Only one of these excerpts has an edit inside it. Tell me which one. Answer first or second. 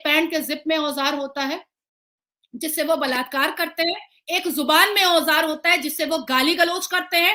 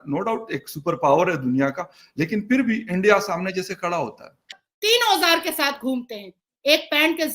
second